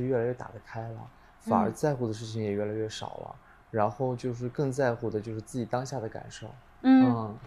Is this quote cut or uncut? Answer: uncut